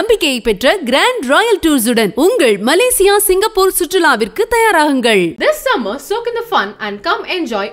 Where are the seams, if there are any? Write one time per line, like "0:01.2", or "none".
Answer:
none